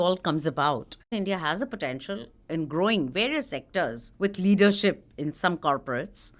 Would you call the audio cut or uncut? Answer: cut